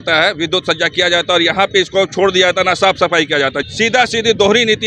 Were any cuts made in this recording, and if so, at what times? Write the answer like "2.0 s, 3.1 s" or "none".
3.6 s